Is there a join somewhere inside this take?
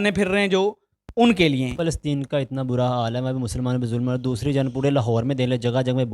yes; 1 cut; at 1.7 s

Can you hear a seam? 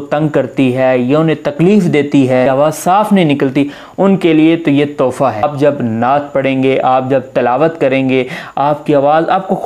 yes; 2 cuts; at 2.5 s, 5.4 s

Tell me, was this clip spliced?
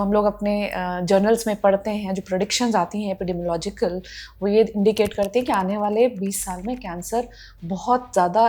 no; 0 cuts

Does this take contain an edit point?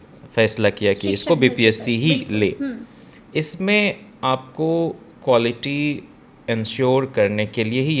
no; 0 cuts

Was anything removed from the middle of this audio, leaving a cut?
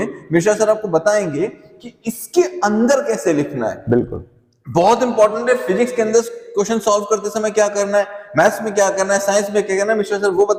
no; 0 cuts

